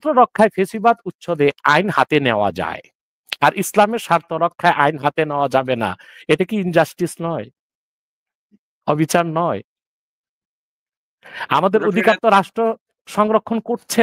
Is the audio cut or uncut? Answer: uncut